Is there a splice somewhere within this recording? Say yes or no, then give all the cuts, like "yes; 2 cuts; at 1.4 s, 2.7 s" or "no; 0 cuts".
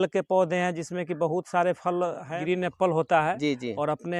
yes; 1 cut; at 2.3 s